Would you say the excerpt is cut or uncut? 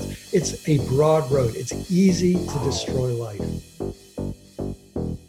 cut